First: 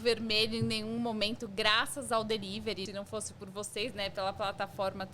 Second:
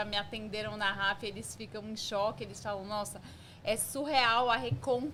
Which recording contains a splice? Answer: first; 1 cut; at 2.9 s

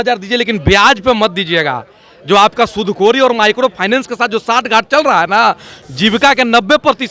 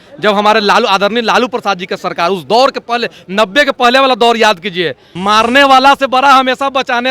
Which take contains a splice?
second; 1 cut; at 5.1 s

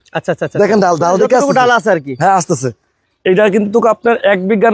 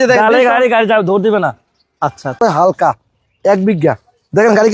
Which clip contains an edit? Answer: second; 1 cut; at 2.4 s

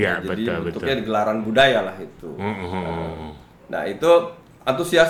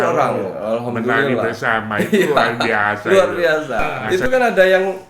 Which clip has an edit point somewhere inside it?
second; 1 cut; at 3.9 s

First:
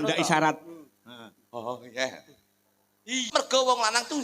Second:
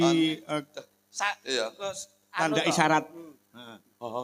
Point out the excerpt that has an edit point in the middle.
first; 1 cut; at 3.2 s

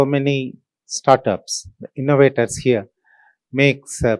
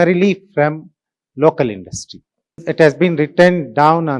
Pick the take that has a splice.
second; 1 cut; at 2.6 s

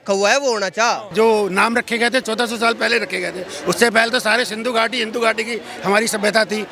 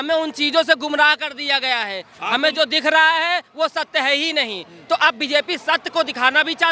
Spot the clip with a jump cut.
first; 2 cuts; at 1.1 s, 2.2 s

